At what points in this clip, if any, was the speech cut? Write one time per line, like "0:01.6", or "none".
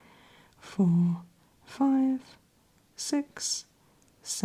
none